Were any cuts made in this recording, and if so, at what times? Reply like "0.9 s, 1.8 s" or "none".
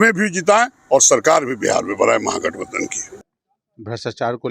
3.1 s